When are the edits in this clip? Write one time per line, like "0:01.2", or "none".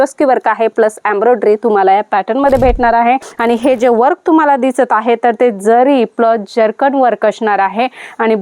0:03.2

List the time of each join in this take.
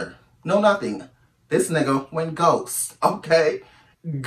none

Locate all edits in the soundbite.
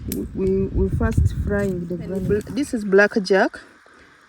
0:02.5

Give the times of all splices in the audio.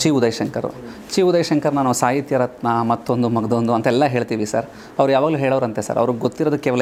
none

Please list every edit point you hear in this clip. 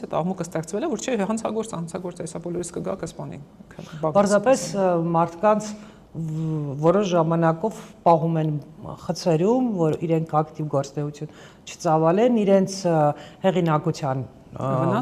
none

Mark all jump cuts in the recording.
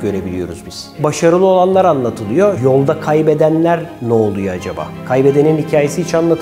0:01.0
0:02.6

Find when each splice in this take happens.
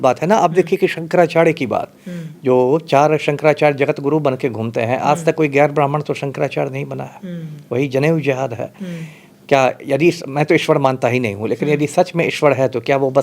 none

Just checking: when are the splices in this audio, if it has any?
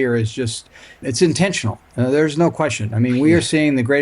0:01.0

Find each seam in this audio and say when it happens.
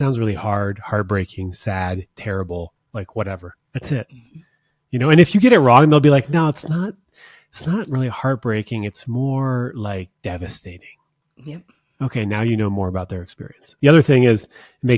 0:13.6

